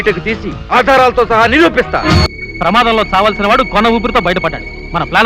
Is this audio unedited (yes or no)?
no